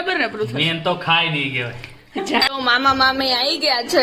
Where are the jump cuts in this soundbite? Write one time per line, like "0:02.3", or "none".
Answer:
0:02.5